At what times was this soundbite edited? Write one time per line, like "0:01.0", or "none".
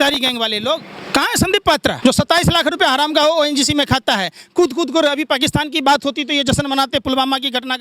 0:01.0
0:02.0